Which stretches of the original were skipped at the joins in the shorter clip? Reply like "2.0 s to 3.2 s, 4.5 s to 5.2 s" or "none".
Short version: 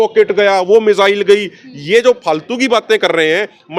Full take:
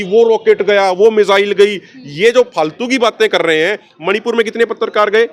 none